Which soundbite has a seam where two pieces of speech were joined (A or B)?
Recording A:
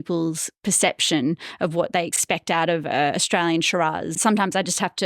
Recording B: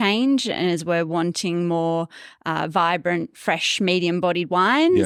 A